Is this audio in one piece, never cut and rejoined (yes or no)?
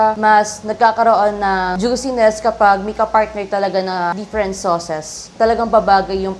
no